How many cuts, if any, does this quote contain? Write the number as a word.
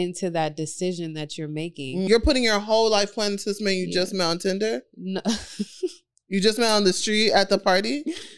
one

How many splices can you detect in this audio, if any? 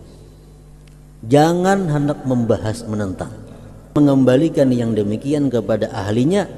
one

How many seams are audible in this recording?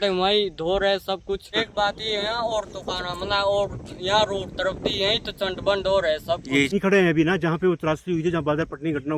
two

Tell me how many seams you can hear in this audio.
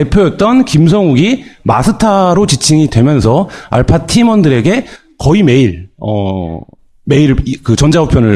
zero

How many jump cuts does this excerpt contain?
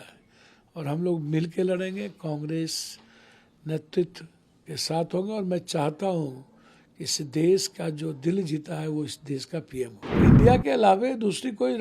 one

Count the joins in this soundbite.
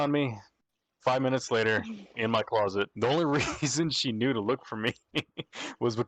one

